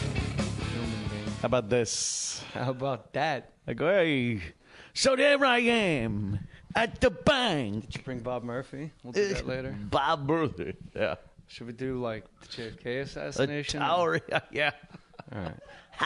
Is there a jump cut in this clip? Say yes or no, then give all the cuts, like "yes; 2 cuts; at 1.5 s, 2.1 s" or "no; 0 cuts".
no; 0 cuts